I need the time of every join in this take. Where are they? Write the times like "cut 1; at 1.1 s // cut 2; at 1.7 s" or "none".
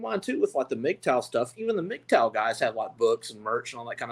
none